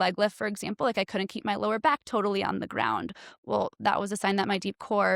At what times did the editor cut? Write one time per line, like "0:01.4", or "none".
none